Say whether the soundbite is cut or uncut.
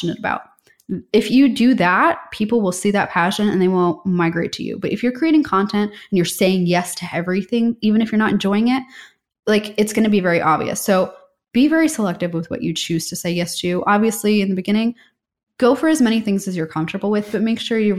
uncut